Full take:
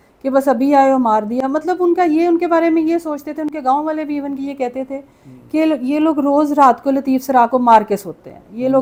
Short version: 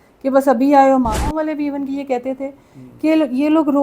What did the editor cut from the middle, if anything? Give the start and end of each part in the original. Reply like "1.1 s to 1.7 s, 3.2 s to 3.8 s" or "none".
1.3 s to 3.8 s